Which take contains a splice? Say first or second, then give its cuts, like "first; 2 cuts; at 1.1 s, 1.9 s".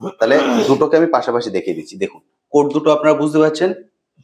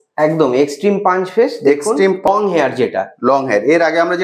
second; 1 cut; at 2.3 s